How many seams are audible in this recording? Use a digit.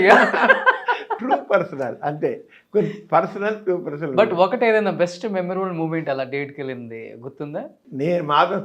0